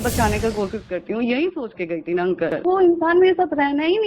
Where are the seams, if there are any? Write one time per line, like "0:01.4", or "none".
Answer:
0:02.6